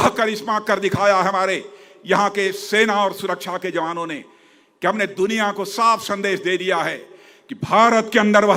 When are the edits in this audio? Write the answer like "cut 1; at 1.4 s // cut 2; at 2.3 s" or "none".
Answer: none